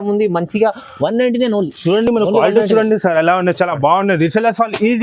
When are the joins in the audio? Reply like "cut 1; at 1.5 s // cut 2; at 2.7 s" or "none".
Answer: none